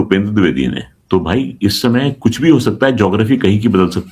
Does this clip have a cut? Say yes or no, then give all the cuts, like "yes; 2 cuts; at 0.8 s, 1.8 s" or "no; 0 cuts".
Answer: yes; 1 cut; at 0.9 s